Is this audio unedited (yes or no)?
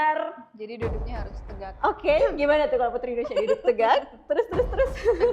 yes